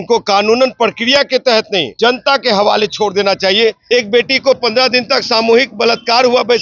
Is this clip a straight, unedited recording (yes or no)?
no